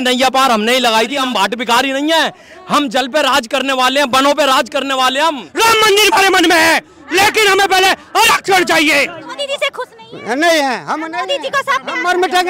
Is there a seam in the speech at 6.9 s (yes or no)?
no